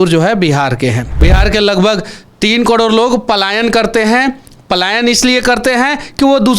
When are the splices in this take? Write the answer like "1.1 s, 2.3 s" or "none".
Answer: 1.1 s